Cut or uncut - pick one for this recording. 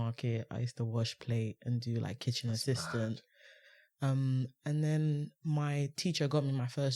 uncut